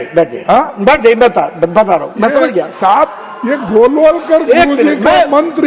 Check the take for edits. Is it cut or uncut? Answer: uncut